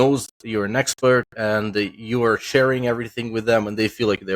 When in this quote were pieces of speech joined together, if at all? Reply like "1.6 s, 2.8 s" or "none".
none